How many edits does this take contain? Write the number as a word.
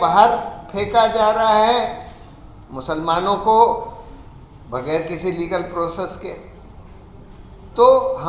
zero